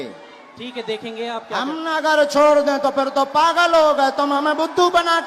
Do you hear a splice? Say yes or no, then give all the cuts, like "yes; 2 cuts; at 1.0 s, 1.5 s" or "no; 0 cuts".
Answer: no; 0 cuts